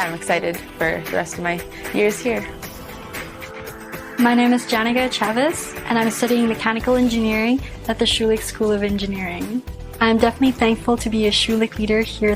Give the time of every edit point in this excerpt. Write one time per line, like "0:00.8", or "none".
0:06.8